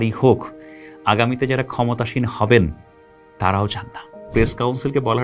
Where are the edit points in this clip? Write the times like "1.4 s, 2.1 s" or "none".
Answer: 4.3 s